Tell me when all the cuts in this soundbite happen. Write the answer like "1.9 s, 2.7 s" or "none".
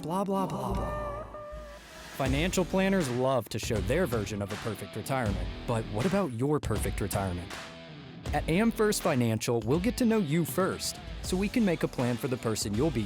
none